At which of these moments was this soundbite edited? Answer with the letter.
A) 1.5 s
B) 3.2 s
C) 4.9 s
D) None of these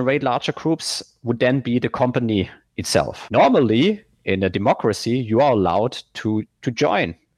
B